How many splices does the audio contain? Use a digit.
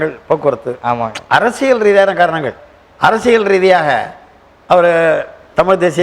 1